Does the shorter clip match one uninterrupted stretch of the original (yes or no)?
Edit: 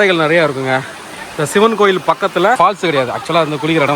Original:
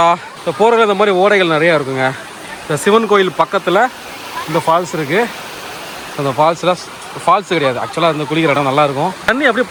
no